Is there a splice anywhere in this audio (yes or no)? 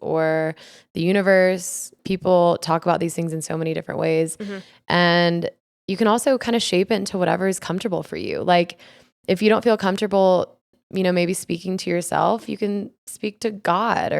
yes